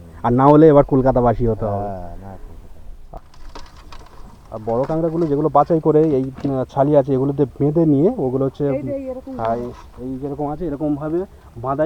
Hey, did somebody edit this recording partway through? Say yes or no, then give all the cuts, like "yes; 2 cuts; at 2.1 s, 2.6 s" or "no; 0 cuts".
yes; 1 cut; at 3.2 s